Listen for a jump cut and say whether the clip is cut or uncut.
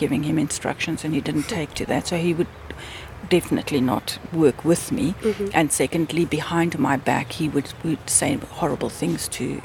uncut